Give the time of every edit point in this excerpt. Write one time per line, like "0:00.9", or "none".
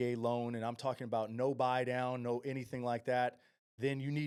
none